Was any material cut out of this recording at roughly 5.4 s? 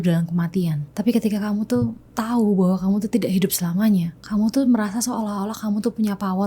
no; 2 cuts; at 0.9 s, 4.2 s

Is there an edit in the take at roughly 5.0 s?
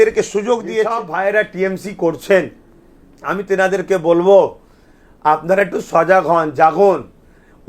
no; 1 cut; at 1.0 s

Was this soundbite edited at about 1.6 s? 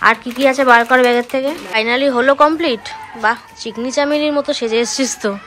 yes; 1 cut; at 1.6 s

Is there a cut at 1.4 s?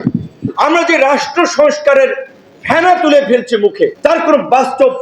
no; 1 cut; at 3.9 s

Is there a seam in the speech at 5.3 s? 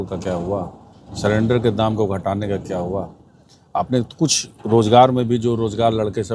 no; 0 cuts

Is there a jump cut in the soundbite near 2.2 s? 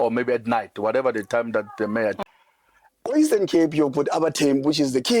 yes; 1 cut; at 2.2 s

